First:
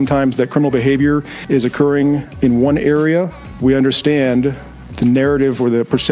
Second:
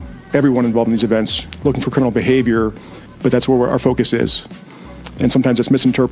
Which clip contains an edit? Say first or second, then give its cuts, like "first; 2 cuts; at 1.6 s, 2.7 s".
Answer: first; 4 cuts; at 1.3 s, 2.3 s, 3.4 s, 4.9 s